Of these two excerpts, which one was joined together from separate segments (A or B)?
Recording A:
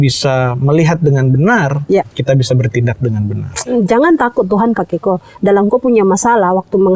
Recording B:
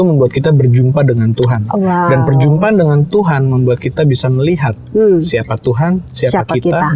A